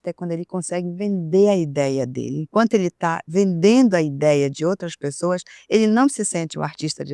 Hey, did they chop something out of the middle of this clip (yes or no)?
no